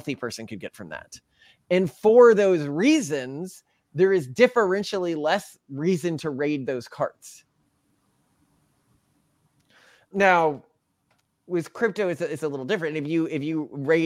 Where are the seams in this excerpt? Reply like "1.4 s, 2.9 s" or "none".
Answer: none